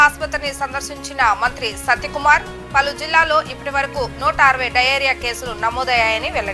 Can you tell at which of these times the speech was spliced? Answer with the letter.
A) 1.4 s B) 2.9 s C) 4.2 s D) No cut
D